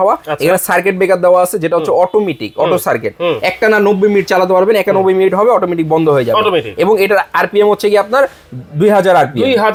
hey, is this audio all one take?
yes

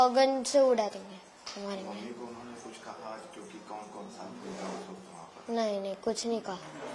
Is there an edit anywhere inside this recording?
no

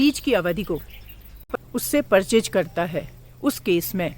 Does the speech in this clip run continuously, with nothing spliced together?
no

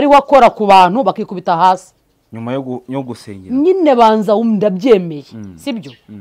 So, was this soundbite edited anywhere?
no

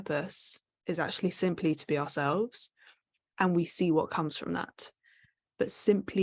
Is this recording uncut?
yes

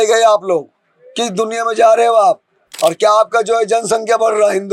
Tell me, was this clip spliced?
yes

